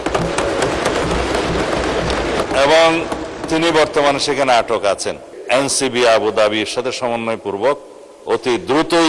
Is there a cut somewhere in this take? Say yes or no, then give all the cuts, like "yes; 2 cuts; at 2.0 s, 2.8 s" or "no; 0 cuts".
yes; 2 cuts; at 2.4 s, 5.2 s